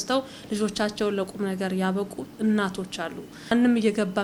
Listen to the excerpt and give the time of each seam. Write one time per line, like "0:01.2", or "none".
none